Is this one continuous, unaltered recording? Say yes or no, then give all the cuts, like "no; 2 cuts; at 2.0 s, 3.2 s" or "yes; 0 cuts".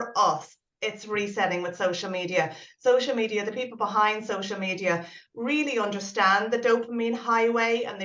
yes; 0 cuts